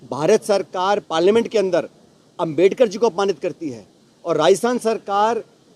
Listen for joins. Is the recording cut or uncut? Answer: uncut